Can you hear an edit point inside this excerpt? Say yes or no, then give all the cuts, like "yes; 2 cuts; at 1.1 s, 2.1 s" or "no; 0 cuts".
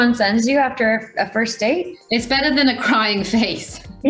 no; 0 cuts